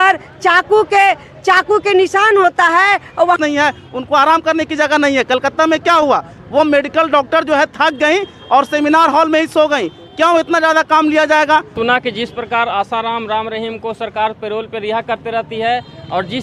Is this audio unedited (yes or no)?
no